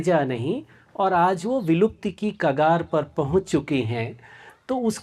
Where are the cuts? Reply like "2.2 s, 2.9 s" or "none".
none